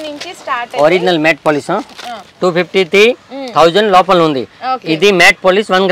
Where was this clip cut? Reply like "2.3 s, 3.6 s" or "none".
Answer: 2.4 s